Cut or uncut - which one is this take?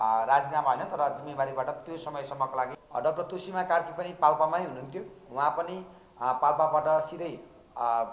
cut